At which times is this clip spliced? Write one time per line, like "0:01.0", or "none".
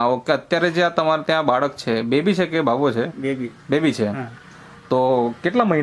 none